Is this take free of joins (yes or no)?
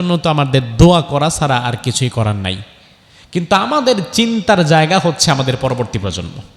yes